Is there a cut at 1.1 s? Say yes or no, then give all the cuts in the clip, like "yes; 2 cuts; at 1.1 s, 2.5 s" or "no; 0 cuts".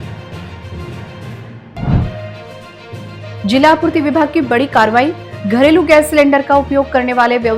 yes; 1 cut; at 1.1 s